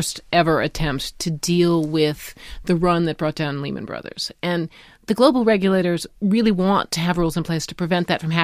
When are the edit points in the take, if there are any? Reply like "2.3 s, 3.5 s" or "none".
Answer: none